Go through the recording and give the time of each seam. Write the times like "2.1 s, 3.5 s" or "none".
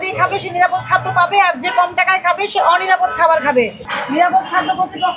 3.8 s